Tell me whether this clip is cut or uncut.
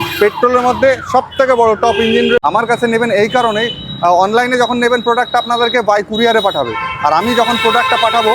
cut